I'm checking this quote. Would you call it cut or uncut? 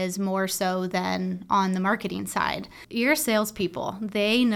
cut